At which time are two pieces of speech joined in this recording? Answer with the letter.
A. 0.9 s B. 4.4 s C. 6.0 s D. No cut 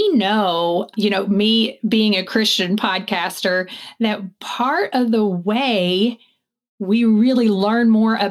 A